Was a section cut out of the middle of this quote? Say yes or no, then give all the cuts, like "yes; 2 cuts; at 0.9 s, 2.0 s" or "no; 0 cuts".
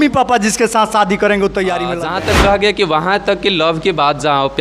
yes; 1 cut; at 1.9 s